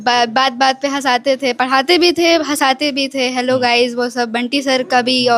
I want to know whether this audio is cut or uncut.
uncut